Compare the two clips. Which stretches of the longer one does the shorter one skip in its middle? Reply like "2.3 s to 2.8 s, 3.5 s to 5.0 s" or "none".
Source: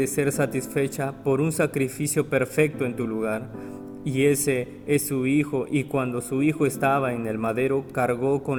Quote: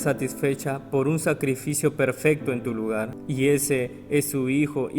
3.5 s to 4.0 s